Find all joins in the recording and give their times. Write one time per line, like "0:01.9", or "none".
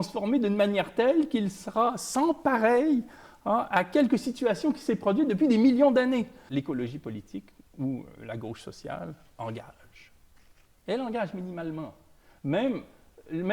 0:06.4